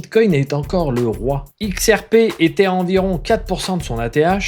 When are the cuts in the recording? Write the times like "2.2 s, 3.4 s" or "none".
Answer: 1.5 s